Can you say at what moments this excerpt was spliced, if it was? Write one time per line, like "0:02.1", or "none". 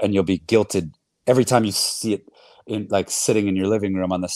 none